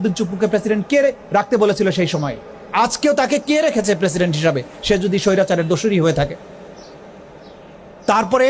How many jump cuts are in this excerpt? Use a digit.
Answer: 0